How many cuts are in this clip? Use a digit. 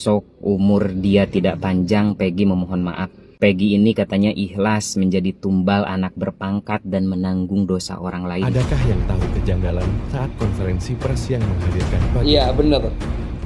1